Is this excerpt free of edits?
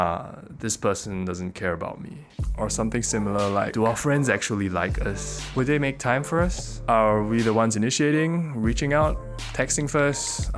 yes; 0 cuts

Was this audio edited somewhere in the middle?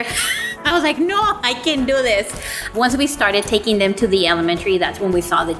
no; 0 cuts

